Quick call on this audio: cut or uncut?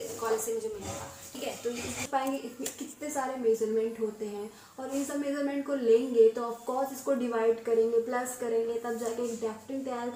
uncut